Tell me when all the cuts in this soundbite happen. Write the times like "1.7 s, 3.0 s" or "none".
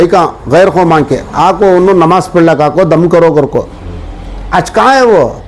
none